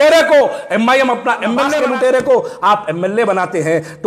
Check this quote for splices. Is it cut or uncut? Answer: cut